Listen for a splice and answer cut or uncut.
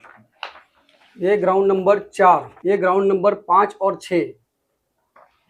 cut